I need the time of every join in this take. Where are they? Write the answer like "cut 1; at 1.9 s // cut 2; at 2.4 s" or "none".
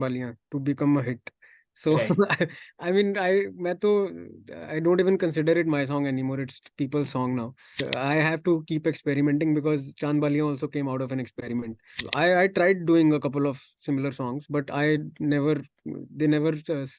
cut 1; at 7.8 s // cut 2; at 12.0 s